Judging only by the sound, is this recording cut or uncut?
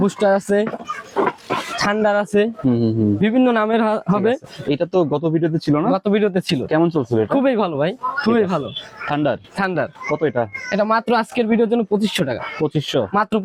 uncut